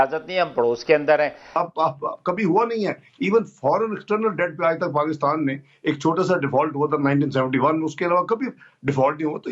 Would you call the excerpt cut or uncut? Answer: cut